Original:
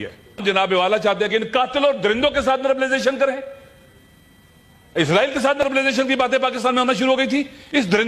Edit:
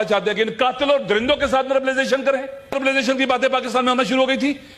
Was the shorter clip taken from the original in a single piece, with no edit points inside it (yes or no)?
no